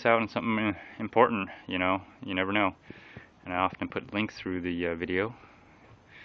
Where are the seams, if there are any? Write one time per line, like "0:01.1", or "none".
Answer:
none